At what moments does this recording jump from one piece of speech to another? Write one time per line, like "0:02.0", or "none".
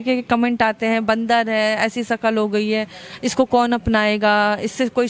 none